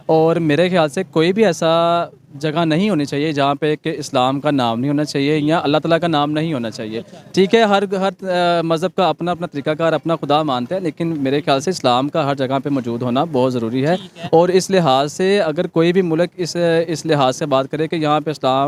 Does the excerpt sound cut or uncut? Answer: uncut